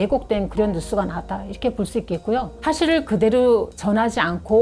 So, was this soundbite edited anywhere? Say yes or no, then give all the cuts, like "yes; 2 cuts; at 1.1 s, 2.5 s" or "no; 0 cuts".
yes; 1 cut; at 2.5 s